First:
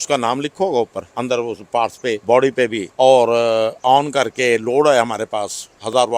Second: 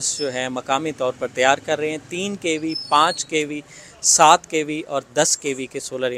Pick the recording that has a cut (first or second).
first